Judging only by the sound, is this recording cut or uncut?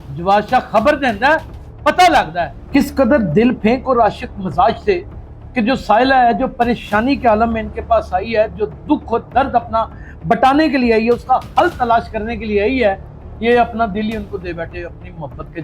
cut